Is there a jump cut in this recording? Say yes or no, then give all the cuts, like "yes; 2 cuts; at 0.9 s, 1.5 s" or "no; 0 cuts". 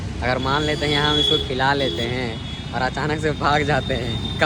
no; 0 cuts